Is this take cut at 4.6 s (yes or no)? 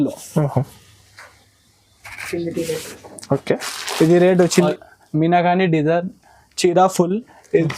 yes